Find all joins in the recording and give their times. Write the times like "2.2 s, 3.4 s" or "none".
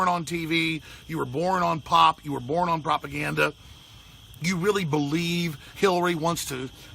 4.3 s